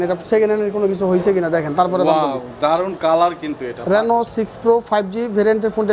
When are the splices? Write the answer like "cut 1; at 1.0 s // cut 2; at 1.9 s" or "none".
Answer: cut 1; at 3.7 s